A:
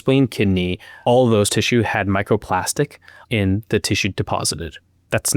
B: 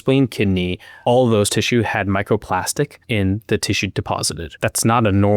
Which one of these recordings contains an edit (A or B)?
B